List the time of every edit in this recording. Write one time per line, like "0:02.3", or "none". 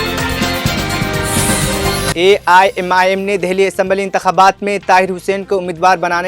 0:02.1